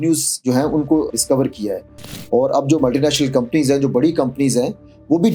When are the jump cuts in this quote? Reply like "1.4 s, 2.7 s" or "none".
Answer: 1.1 s